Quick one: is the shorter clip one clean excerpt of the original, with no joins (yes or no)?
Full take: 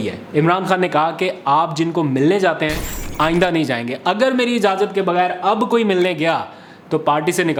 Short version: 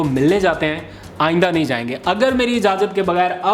yes